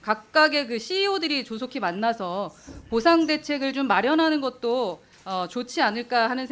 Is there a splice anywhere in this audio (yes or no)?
no